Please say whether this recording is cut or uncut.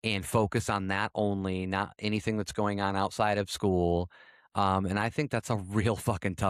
uncut